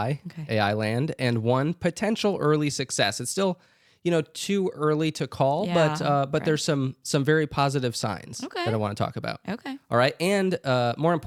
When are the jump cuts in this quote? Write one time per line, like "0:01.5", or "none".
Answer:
none